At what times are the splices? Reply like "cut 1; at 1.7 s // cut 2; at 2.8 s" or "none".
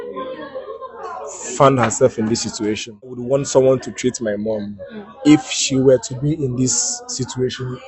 cut 1; at 3.2 s